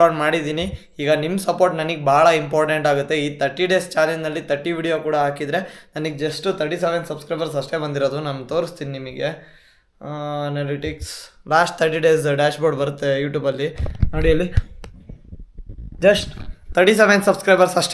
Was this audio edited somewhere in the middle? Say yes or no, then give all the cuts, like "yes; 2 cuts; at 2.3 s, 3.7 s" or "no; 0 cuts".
no; 0 cuts